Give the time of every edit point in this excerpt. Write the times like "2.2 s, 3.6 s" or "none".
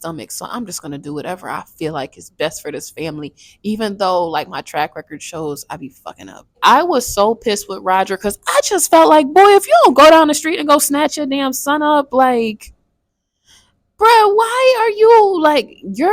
6.6 s

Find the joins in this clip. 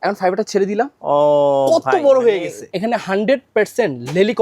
2.7 s

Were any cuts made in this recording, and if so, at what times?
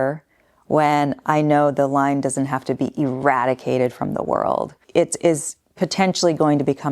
4.8 s

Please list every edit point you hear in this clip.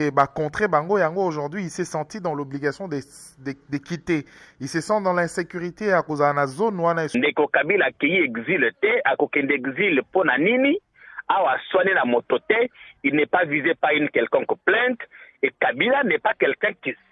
7.1 s

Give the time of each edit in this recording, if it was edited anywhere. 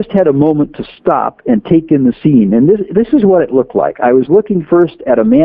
none

